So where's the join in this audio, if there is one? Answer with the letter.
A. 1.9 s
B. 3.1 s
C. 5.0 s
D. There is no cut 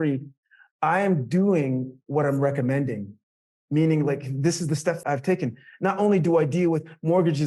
C